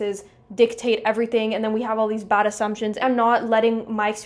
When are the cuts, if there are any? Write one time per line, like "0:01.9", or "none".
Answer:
0:02.9